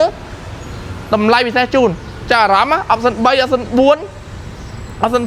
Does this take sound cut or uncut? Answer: uncut